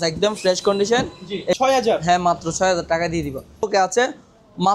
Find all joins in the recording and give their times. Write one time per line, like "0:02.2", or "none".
0:01.6
0:03.7